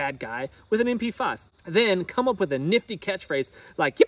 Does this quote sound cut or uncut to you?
cut